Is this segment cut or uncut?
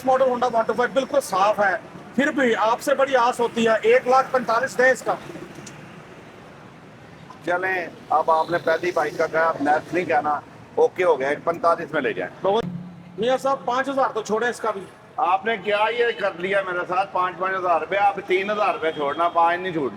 cut